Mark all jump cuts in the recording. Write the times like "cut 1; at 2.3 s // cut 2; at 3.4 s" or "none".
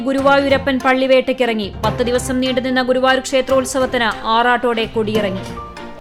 none